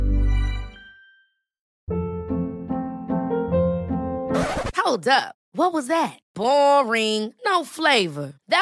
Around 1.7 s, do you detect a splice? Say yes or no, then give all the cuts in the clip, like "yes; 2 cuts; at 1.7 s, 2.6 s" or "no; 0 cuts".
yes; 1 cut; at 1.7 s